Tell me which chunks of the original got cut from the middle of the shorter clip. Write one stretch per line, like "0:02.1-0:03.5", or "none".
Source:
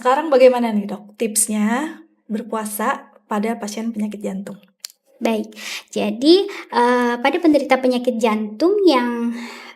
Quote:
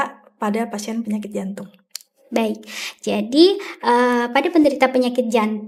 none